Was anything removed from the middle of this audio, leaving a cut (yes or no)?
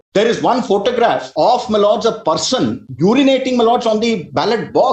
yes